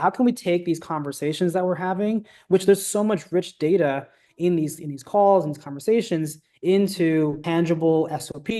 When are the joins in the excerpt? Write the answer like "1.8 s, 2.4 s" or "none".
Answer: 7.4 s